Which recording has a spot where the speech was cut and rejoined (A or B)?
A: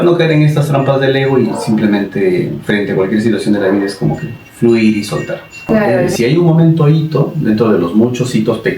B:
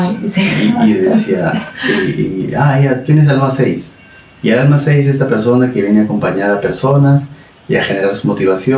A